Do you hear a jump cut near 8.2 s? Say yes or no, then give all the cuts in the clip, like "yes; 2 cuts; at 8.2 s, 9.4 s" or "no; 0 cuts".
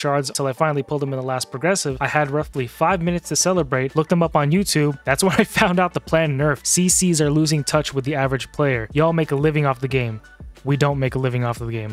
no; 2 cuts; at 3.9 s, 6.6 s